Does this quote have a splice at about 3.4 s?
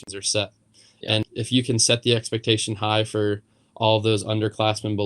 no; 1 cut; at 1.2 s

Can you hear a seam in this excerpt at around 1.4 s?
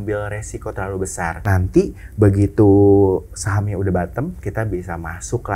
yes; 1 cut; at 1.4 s

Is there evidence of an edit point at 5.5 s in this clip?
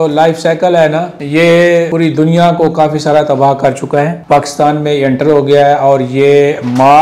no; 3 cuts; at 1.2 s, 1.9 s, 4.2 s

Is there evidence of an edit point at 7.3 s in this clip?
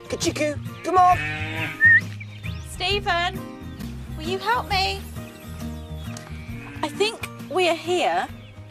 yes; 1 cut; at 7.3 s

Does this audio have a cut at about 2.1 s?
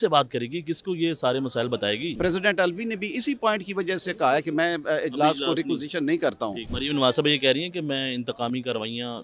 yes; 2 cuts; at 2.1 s, 6.6 s

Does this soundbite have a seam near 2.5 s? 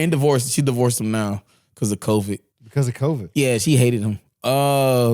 yes; 1 cut; at 2.5 s

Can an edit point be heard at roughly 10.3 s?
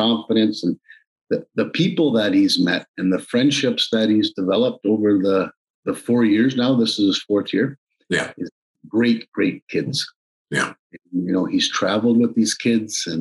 no; 0 cuts

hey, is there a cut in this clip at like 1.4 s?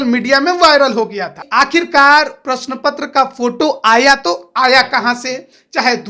yes; 1 cut; at 1.4 s

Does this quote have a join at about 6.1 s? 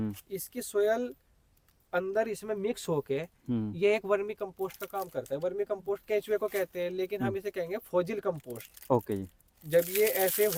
no; 0 cuts

